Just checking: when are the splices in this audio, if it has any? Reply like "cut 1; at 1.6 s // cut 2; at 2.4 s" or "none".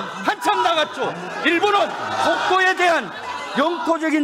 none